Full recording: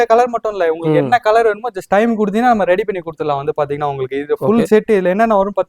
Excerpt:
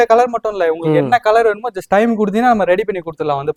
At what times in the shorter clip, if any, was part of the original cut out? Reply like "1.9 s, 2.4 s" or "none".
none